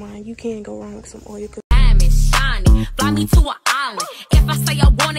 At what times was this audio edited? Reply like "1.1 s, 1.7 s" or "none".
1.6 s